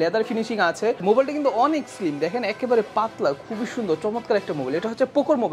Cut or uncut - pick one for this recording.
uncut